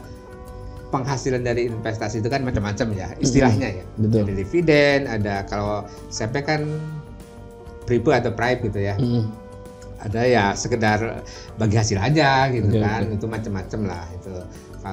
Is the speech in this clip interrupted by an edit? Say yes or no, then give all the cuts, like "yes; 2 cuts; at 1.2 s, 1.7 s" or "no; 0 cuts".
no; 0 cuts